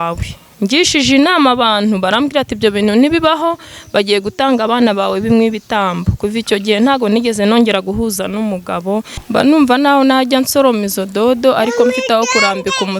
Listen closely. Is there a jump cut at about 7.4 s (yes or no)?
no